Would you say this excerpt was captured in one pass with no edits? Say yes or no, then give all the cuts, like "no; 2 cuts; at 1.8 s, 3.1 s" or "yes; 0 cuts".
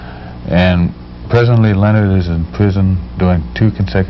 yes; 0 cuts